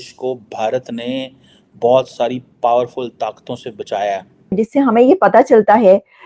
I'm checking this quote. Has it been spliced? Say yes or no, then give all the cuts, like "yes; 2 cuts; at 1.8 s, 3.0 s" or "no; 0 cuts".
yes; 1 cut; at 4.4 s